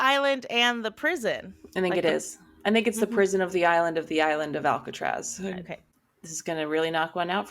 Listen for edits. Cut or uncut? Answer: cut